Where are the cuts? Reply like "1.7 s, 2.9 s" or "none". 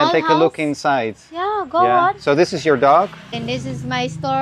3.3 s